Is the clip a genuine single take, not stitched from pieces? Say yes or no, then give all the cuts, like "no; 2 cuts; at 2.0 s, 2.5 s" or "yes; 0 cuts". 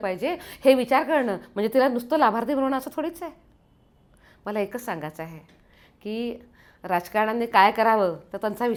yes; 0 cuts